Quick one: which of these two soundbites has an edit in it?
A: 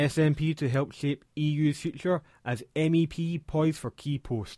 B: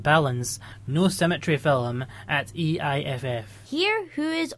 B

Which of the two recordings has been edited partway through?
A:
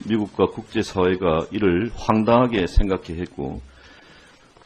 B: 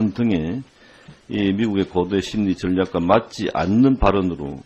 A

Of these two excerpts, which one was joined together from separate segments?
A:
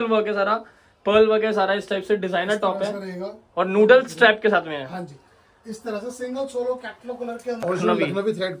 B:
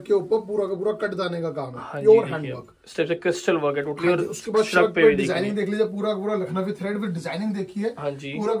A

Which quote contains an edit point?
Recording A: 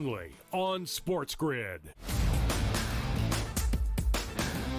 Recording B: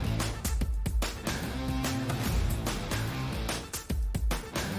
A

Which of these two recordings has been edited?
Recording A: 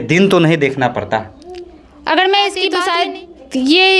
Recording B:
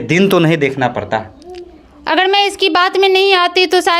A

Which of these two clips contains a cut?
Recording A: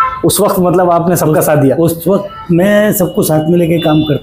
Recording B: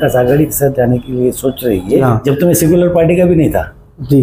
B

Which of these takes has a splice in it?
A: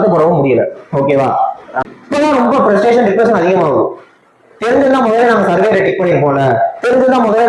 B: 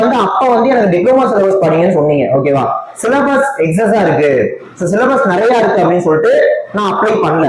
A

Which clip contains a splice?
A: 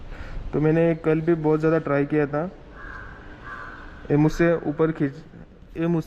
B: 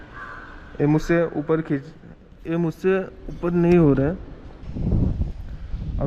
B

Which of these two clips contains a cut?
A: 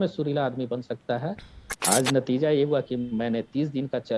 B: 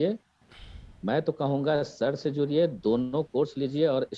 A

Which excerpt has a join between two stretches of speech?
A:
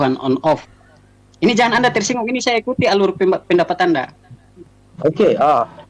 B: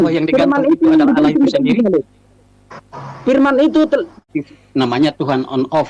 B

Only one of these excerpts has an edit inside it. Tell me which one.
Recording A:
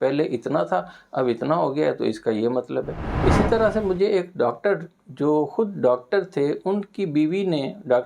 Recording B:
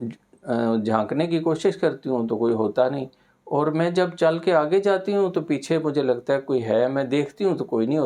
A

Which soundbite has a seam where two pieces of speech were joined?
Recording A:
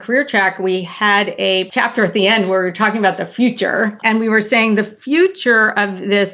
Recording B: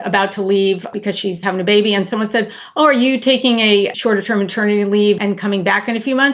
A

